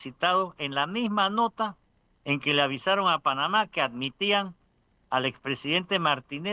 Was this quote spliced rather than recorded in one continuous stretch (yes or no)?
no